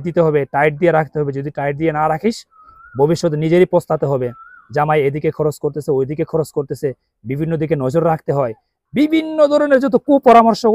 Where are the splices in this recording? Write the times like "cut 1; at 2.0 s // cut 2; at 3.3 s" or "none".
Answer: none